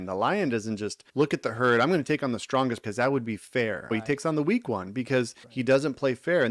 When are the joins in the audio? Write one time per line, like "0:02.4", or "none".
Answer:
0:01.0
0:02.8
0:03.9
0:05.4